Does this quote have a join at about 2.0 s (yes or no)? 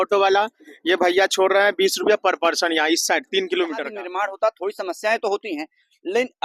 no